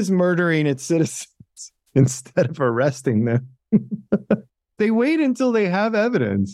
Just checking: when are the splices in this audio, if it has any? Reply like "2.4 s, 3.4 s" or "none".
4.6 s